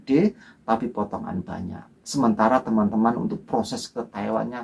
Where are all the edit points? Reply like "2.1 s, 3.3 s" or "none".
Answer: none